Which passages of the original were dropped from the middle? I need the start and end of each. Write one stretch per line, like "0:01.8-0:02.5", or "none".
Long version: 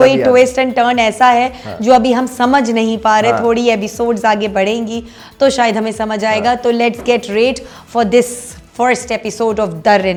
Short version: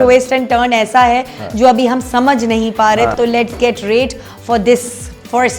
0:03.4-0:06.6